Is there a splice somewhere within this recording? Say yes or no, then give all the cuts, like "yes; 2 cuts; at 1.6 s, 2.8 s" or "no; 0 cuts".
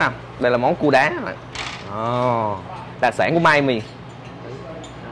no; 0 cuts